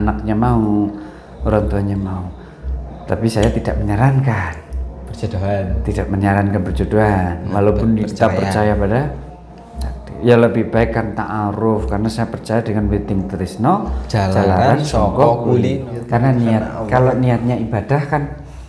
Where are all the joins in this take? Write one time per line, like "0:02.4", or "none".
0:15.9